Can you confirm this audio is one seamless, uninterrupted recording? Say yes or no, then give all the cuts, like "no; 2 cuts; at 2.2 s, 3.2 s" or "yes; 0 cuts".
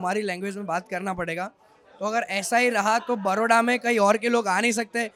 yes; 0 cuts